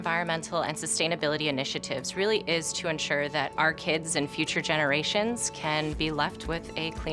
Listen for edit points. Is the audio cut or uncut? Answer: uncut